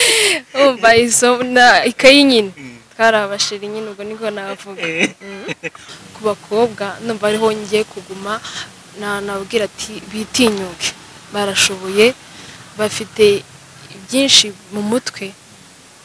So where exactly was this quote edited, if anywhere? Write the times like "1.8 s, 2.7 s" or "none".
5.8 s